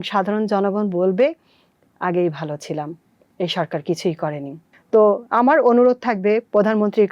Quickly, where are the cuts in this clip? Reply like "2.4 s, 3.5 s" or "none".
4.6 s